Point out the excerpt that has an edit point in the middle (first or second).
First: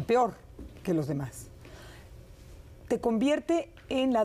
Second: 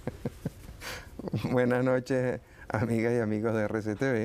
first